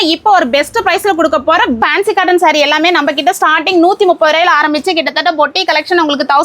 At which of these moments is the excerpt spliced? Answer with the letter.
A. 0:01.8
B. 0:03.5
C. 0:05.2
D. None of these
A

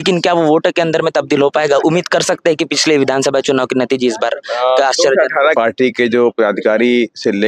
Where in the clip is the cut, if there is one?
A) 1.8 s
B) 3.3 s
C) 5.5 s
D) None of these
C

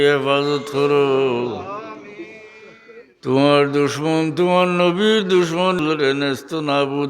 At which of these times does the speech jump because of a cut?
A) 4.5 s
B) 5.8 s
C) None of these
B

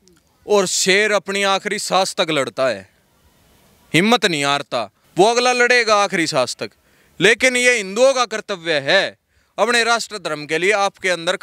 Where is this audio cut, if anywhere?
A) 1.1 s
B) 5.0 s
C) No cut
B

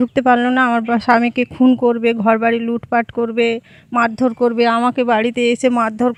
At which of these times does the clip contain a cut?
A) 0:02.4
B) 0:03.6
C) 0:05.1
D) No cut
D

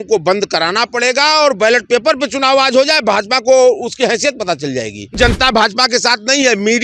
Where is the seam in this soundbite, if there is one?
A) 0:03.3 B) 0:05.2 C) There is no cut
B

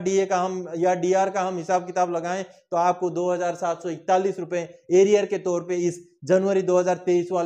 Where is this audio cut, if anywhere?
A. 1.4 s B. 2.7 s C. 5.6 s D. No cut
D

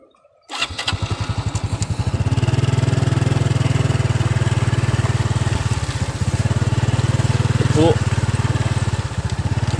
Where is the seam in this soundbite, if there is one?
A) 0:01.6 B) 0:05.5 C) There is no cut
B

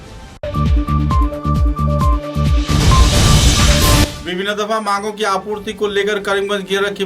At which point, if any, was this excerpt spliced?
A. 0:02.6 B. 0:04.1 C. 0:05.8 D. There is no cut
B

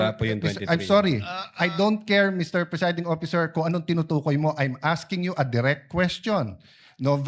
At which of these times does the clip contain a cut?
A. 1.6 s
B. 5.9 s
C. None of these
C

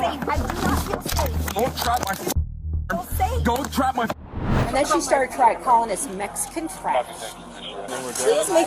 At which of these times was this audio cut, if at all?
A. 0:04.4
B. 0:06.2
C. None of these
A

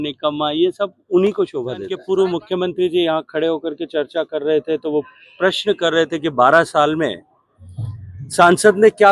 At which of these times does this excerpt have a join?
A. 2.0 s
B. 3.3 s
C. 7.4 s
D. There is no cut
A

